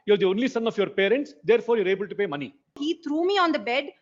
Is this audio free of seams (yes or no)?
no